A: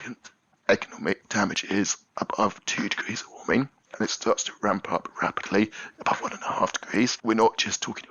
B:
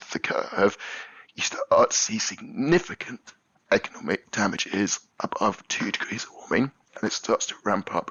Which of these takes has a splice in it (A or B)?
A